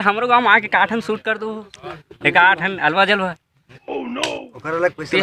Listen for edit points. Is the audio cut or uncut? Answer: uncut